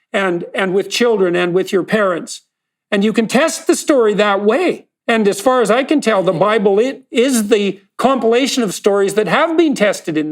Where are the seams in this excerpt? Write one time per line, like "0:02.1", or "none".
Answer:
0:04.9